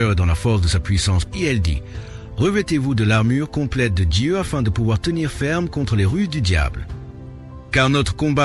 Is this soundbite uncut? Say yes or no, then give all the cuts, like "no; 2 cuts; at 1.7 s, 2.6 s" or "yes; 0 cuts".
no; 1 cut; at 1.3 s